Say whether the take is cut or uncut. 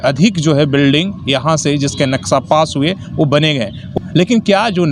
cut